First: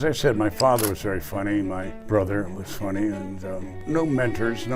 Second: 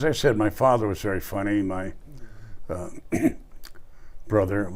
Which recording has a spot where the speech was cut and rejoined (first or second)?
first